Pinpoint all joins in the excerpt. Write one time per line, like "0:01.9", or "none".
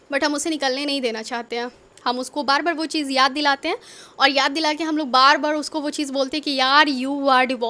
none

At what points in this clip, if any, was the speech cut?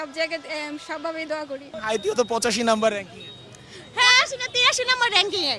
none

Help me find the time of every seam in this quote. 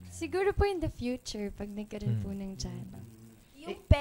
0:02.9

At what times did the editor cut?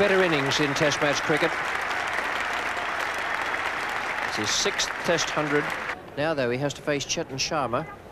0:02.6

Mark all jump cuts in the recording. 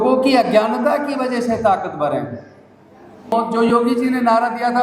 0:03.3

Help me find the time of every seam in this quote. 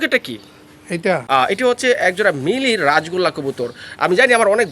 0:01.2

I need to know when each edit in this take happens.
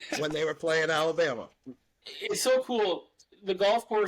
0:02.0

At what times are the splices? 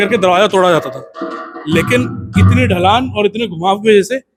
none

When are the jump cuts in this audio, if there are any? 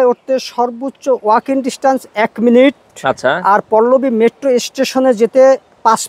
none

